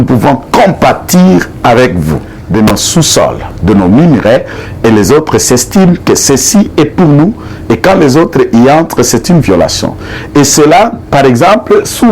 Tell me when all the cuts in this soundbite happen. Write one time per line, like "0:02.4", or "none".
0:02.3